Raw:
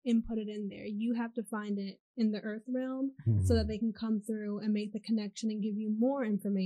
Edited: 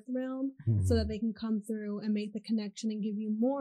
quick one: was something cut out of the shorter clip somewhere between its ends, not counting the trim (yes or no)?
no